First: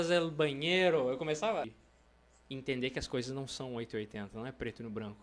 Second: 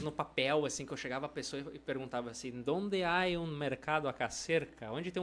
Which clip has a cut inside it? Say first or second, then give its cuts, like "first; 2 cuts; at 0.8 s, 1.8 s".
first; 1 cut; at 1.7 s